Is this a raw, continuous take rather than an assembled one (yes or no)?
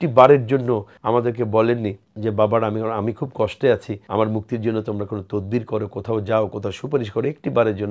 no